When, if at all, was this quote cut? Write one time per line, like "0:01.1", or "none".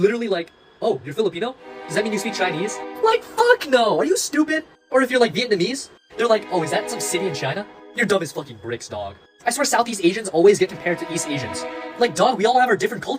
none